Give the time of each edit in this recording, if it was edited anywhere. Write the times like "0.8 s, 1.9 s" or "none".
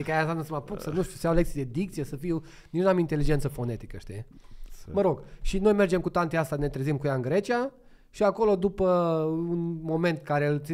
none